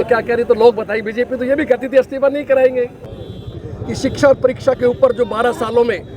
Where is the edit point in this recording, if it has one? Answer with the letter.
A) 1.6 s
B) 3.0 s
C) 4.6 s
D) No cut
B